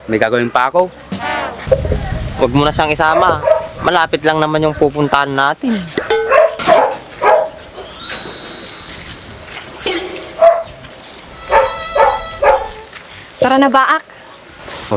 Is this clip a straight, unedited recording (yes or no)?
yes